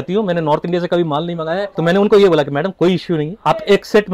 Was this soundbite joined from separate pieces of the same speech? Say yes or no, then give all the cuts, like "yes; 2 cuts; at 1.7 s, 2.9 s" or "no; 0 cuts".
yes; 1 cut; at 1.7 s